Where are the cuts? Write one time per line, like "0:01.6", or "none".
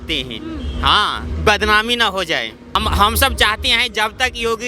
0:01.2
0:02.8